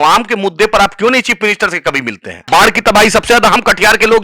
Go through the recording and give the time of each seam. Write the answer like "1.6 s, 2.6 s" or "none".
2.5 s